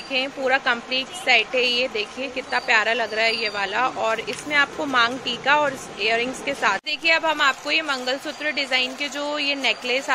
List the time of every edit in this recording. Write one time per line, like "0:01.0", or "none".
0:06.8